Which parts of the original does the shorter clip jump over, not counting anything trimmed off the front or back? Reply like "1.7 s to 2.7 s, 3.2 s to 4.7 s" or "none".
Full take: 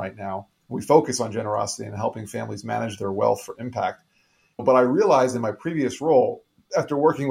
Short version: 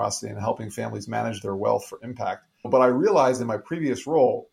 4.1 s to 4.4 s

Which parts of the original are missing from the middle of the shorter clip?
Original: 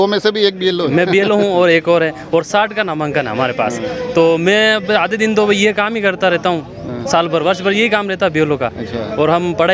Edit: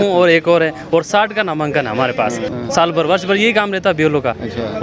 3.9 s to 6.8 s

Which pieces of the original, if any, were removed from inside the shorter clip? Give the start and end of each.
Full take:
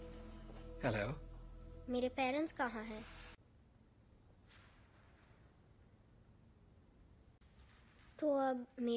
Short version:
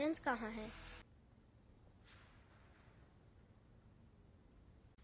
3.4 s to 3.5 s

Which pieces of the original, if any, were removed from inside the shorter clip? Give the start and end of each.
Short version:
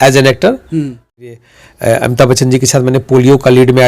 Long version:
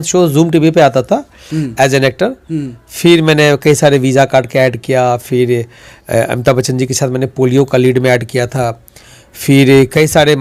3.0 s to 5.5 s

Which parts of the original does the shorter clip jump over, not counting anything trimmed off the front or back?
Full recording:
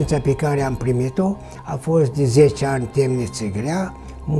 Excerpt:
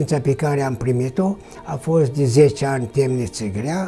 none

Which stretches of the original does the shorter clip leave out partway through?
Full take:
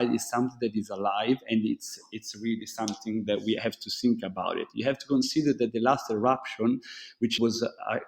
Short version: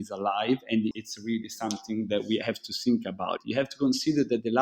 1.7 s to 2.1 s, 4.6 s to 4.7 s

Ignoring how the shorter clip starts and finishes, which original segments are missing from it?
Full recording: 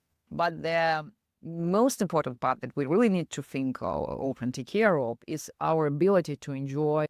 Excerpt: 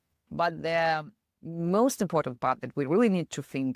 none

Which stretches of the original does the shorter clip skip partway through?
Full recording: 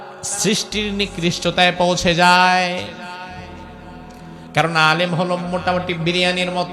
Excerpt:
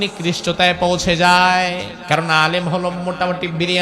2.9 s to 4.4 s

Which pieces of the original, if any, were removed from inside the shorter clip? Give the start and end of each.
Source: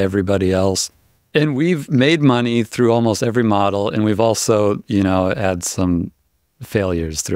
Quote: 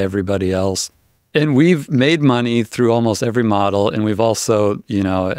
none

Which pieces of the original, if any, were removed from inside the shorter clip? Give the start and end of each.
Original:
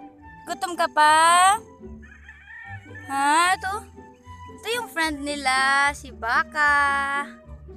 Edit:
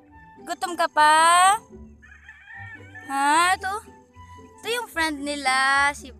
none

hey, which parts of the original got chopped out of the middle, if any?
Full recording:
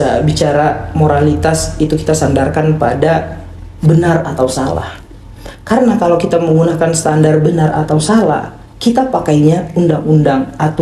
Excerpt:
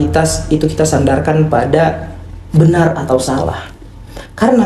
none

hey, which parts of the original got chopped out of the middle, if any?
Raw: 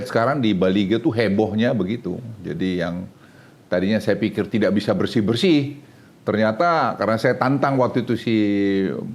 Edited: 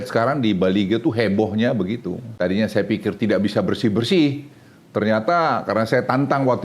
2.2 s to 3.5 s

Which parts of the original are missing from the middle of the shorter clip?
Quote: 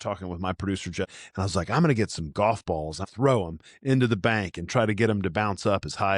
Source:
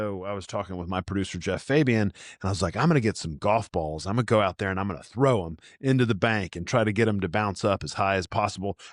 1.6 s to 2.2 s, 4.1 s to 5.0 s

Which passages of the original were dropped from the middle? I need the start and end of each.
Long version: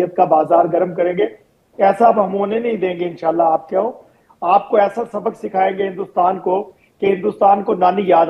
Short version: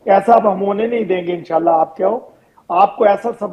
none

